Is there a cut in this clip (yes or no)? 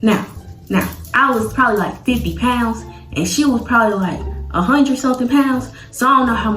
no